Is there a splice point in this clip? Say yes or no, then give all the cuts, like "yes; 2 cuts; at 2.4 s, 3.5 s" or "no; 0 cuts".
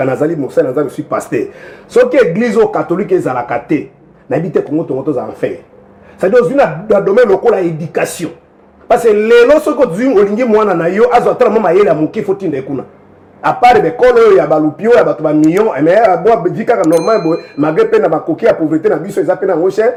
no; 0 cuts